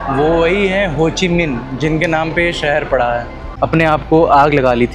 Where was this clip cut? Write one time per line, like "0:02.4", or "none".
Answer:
0:03.4